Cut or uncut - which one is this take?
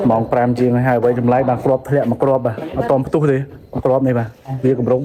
uncut